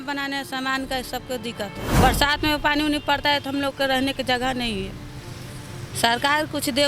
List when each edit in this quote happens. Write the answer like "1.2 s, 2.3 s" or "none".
2.0 s